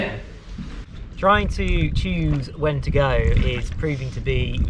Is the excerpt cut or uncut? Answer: cut